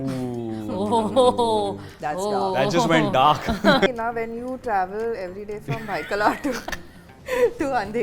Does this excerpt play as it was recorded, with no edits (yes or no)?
no